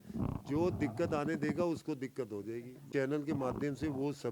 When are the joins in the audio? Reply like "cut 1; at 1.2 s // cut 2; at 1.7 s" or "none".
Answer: cut 1; at 2.8 s